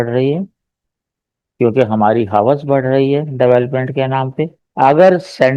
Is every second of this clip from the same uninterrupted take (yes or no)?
yes